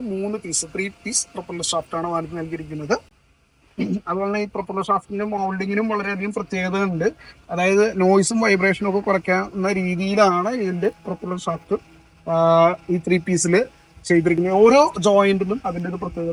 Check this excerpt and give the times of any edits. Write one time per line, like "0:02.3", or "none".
none